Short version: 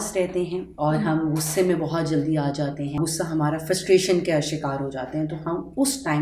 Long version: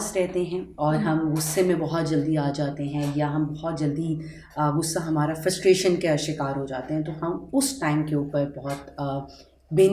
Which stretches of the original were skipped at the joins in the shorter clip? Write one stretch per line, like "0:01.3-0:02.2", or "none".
0:03.0-0:04.7